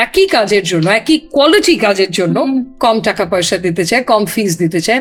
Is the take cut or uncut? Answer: uncut